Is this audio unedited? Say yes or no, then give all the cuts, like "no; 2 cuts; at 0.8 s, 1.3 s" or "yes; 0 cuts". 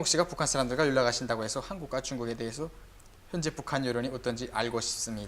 no; 1 cut; at 1.9 s